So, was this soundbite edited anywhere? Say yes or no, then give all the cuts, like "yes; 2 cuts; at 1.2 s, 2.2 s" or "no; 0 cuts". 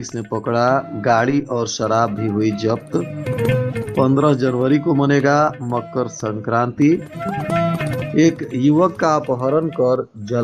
no; 0 cuts